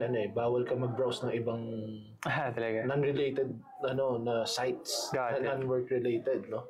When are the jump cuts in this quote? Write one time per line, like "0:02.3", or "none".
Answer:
none

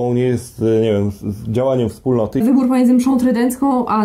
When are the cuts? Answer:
0:02.4

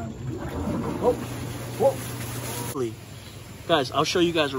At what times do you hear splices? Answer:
0:02.8

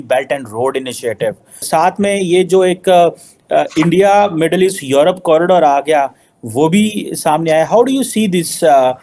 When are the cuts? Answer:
none

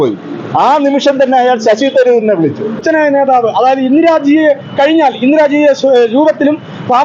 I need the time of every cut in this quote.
0:02.8

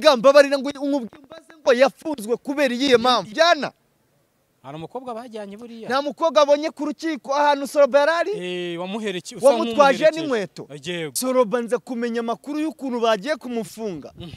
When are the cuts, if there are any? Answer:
0:03.3
0:11.2

